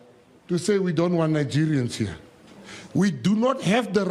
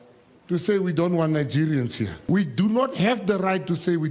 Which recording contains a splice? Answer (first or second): second